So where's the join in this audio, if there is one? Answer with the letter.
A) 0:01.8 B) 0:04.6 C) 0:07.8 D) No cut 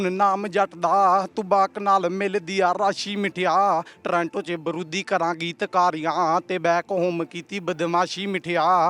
D